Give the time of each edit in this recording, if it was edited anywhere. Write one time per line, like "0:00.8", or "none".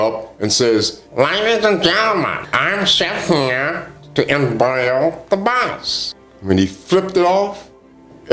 0:01.0
0:02.4